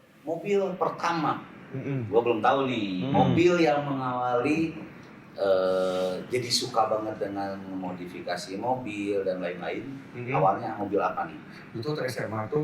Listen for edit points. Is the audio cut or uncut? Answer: uncut